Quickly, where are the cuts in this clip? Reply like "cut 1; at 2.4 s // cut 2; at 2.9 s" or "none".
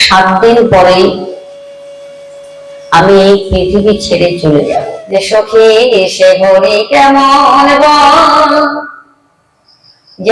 cut 1; at 5.0 s